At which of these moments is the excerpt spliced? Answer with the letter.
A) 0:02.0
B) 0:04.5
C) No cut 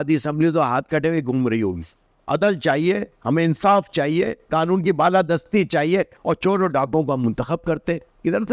A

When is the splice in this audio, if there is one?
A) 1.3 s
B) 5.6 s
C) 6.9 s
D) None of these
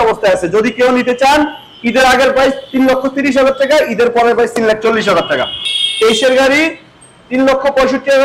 B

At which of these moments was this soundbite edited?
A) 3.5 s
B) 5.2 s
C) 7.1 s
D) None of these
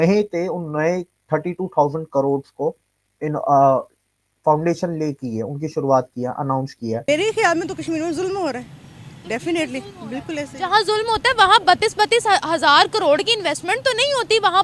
C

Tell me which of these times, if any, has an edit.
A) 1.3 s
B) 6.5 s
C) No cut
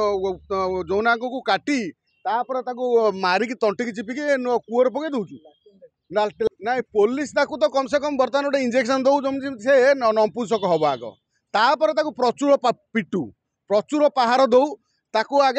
B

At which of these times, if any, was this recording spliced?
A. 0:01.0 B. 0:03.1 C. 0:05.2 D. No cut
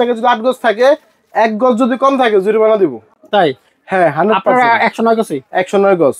D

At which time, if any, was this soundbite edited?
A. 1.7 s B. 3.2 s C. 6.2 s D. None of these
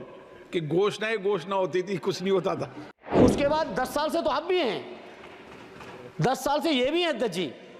B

